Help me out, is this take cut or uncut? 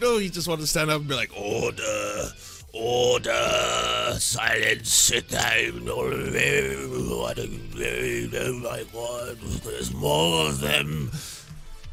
uncut